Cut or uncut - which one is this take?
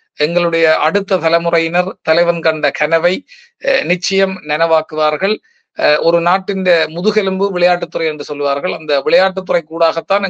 uncut